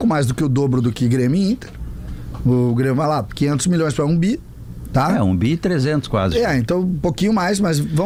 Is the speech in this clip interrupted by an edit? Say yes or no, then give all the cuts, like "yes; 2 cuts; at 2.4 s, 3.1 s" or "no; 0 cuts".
no; 0 cuts